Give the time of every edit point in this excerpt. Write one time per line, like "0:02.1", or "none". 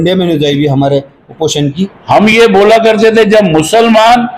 0:01.9